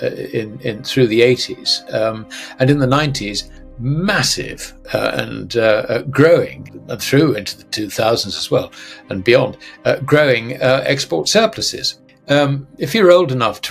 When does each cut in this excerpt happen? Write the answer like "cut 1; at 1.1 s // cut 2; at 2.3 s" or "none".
cut 1; at 12.1 s